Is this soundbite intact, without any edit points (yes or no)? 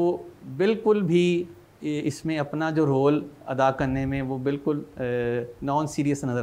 yes